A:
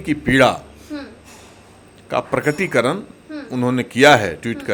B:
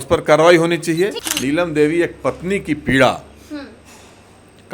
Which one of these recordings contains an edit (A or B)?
B